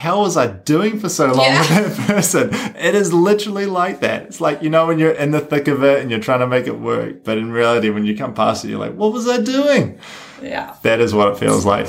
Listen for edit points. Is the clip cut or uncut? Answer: uncut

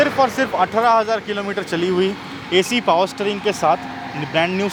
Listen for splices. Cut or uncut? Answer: uncut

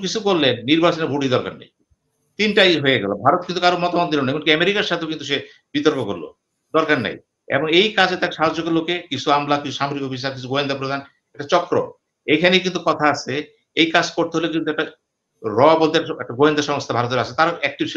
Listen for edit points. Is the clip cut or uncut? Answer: uncut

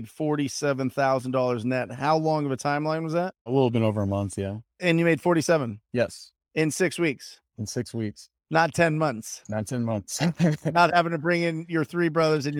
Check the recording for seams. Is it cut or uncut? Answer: cut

